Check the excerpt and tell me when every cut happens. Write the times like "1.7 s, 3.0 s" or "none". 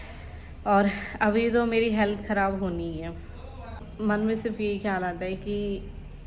3.9 s